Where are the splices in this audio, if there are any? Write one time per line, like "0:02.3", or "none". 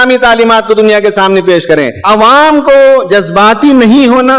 0:02.0